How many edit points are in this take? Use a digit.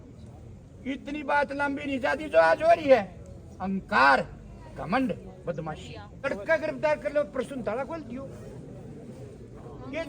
1